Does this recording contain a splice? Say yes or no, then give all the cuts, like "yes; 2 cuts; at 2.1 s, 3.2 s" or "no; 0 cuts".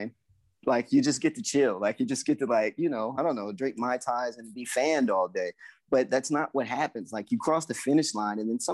no; 0 cuts